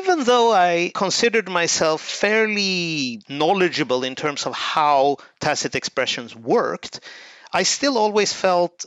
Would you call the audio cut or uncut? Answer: cut